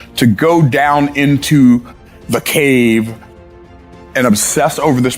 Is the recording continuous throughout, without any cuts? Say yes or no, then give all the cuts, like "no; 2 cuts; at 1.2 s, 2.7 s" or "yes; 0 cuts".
no; 2 cuts; at 1.9 s, 3.5 s